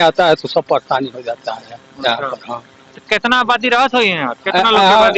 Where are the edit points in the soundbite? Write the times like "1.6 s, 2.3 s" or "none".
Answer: none